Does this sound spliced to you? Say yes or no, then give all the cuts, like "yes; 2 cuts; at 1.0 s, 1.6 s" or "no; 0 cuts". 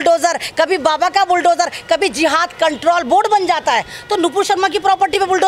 no; 0 cuts